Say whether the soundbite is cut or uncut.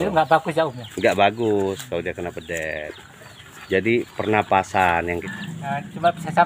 cut